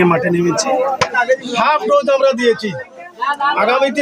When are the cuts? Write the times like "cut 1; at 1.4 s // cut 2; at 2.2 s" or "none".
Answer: cut 1; at 1.1 s